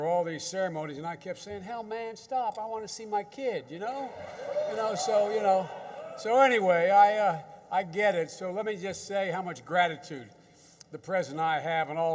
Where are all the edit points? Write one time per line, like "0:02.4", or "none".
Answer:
0:05.9

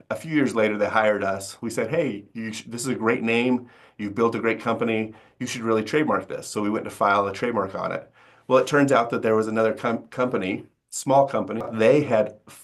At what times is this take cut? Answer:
0:11.6

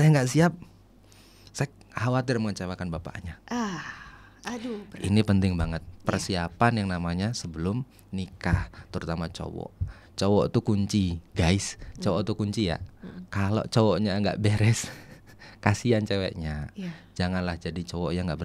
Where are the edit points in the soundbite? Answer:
none

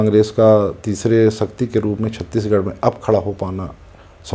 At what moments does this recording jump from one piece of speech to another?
none

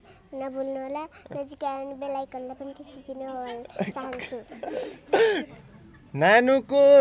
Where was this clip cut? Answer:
0:05.5

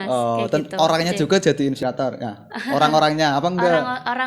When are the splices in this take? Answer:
0:01.8

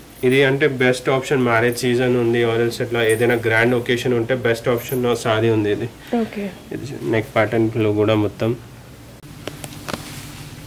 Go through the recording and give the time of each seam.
0:09.2

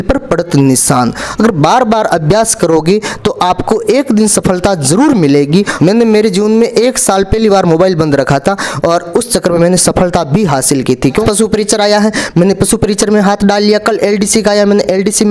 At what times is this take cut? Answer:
0:05.7
0:11.2

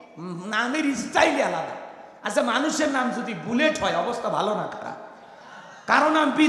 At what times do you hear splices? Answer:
none

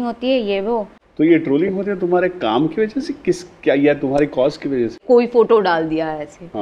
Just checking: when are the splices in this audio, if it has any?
0:01.0
0:05.0

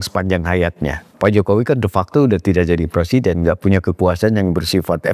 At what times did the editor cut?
0:01.1

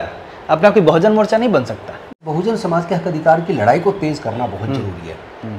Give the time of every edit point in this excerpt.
0:02.1

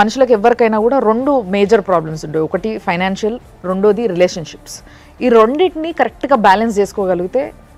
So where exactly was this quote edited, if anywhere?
none

